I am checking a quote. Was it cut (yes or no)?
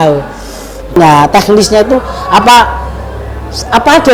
yes